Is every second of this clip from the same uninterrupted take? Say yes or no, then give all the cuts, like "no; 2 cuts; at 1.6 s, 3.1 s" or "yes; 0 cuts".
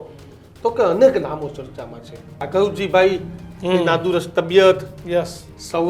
no; 1 cut; at 2.4 s